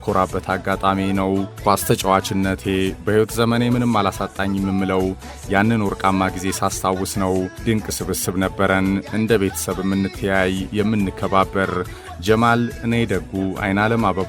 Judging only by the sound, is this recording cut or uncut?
uncut